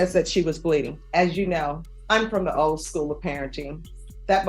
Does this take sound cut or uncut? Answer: cut